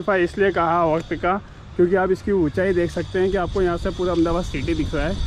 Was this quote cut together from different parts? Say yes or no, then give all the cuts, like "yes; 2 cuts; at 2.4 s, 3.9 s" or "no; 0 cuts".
no; 0 cuts